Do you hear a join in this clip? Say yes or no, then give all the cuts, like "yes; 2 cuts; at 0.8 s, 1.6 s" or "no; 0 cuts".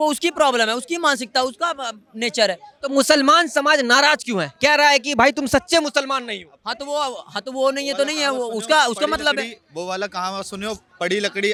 no; 0 cuts